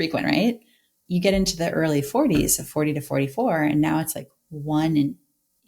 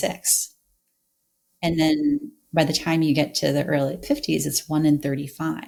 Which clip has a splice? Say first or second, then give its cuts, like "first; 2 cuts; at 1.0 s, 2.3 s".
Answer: first; 1 cut; at 1.0 s